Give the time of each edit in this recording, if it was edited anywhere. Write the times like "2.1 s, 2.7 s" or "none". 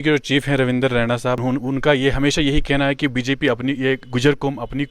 1.4 s